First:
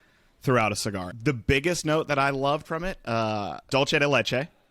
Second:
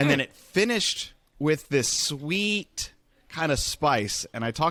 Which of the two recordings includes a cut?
first; 2 cuts; at 1.1 s, 3.7 s

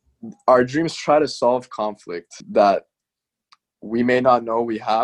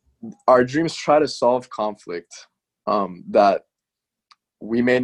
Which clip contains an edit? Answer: first; 1 cut; at 2.4 s

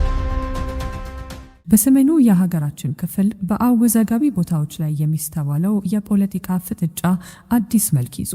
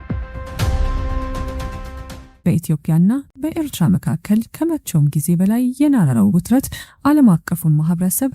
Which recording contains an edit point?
second; 1 cut; at 2.2 s

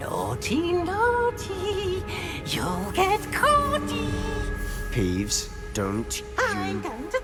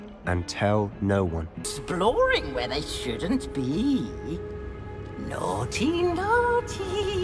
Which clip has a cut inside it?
second; 1 cut; at 1.7 s

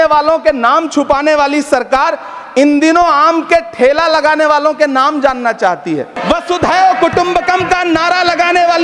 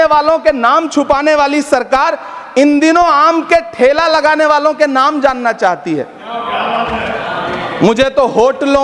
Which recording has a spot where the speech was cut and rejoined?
first; 1 cut; at 6.1 s

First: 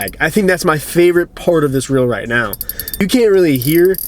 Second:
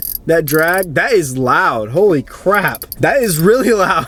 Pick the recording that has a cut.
first; 1 cut; at 3.0 s

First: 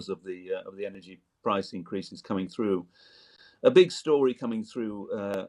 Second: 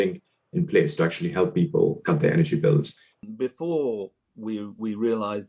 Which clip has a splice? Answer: second; 1 cut; at 3.1 s

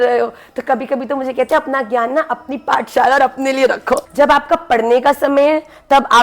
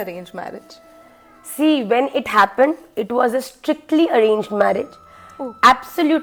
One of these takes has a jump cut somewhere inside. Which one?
first; 1 cut; at 4.1 s

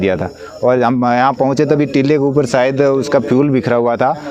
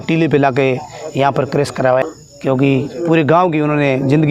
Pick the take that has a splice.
second; 1 cut; at 2.0 s

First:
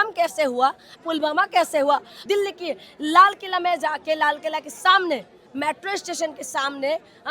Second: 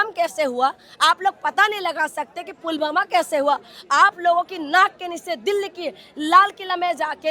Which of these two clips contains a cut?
first; 2 cuts; at 0.9 s, 2.1 s

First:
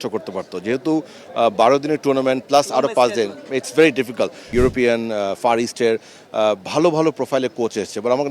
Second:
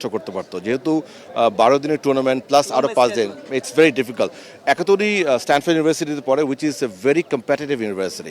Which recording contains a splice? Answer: first; 1 cut; at 4.4 s

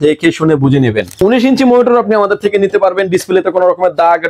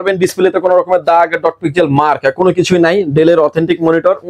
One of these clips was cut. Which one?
first; 1 cut; at 1.1 s

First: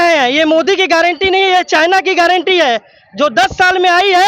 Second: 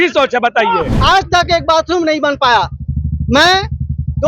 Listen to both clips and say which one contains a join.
second; 1 cut; at 0.9 s

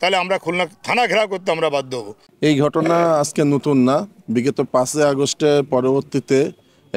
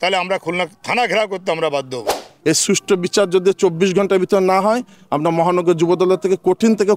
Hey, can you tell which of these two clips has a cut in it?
second; 1 cut; at 2.3 s

